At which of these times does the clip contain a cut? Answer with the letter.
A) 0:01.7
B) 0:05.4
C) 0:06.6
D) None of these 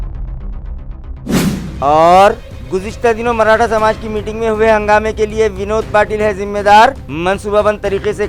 D